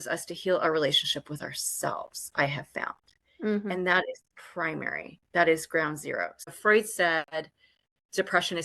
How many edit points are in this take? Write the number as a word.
one